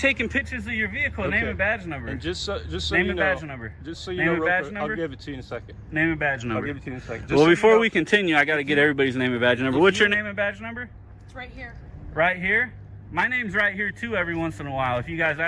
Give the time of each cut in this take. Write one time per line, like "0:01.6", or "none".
none